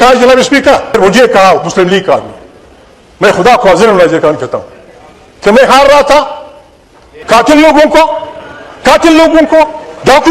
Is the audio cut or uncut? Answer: cut